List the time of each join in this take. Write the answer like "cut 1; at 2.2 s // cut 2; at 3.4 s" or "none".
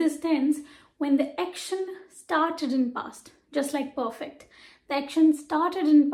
none